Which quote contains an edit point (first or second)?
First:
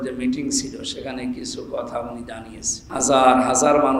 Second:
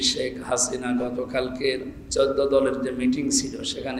first